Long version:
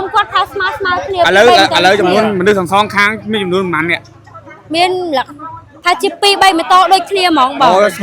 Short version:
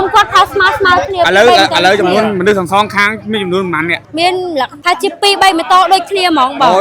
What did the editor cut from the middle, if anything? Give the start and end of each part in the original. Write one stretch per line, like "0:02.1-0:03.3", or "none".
0:04.0-0:04.6
0:05.3-0:05.8